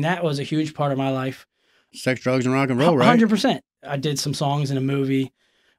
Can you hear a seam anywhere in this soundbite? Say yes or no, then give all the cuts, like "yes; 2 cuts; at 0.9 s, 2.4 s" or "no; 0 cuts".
yes; 2 cuts; at 1.9 s, 3.7 s